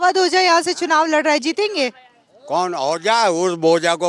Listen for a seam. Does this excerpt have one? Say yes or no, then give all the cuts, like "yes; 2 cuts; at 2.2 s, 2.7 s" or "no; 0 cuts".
no; 0 cuts